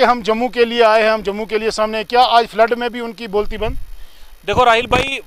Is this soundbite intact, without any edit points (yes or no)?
yes